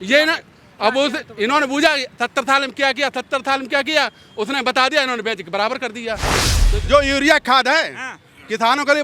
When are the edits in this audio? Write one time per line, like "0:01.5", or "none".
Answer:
0:06.5

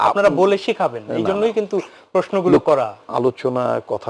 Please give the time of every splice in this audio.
0:03.0

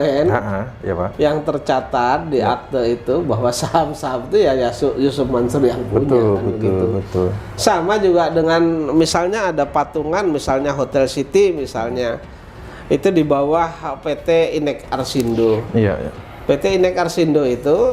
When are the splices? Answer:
none

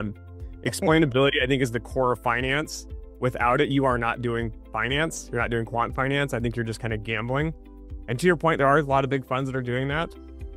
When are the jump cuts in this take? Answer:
none

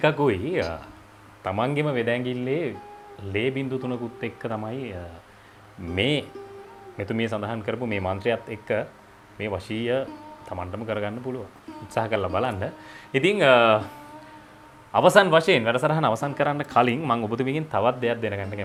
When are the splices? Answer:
none

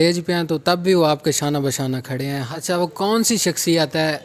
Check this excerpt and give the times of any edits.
0:02.4

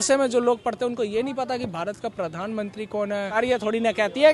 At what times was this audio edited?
0:03.3

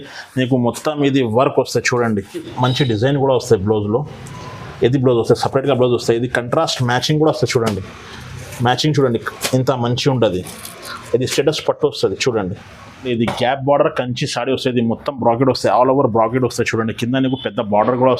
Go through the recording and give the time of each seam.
0:02.5
0:12.9

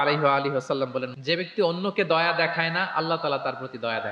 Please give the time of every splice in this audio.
0:01.1

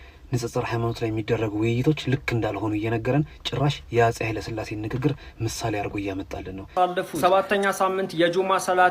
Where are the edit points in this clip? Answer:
0:06.8

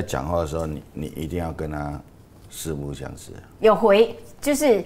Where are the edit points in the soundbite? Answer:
none

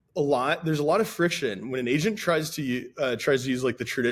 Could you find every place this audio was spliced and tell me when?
none

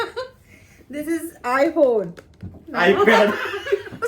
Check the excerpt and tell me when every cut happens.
0:02.4

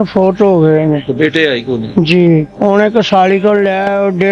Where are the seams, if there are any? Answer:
0:01.1
0:02.5

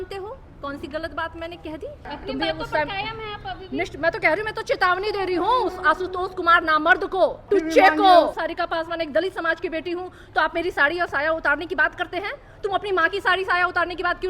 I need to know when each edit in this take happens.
0:02.1
0:07.4
0:08.4

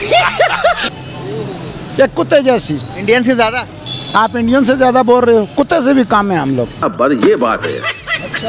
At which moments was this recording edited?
none

